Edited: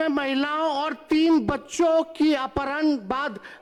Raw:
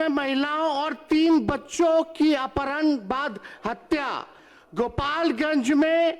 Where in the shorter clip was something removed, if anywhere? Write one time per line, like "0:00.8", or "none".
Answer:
none